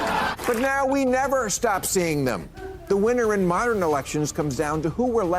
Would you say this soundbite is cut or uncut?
uncut